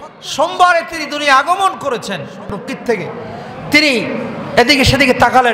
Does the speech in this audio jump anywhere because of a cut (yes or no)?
yes